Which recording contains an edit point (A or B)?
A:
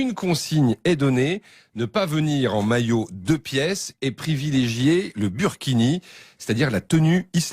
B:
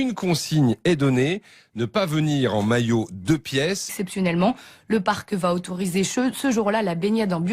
A